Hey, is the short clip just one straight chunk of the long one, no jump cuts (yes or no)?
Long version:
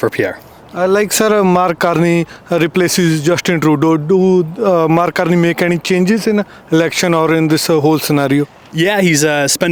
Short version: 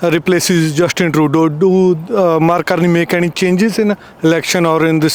yes